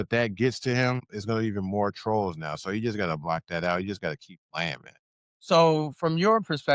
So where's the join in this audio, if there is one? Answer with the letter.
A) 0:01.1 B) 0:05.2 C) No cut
A